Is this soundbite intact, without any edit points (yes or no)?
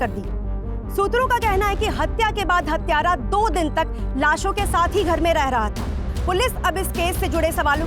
yes